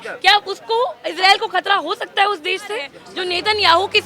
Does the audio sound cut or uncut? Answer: cut